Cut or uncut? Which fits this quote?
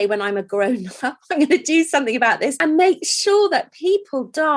cut